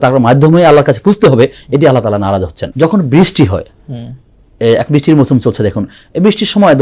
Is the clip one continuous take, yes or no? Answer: no